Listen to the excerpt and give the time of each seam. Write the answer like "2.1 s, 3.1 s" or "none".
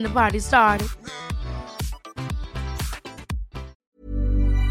3.7 s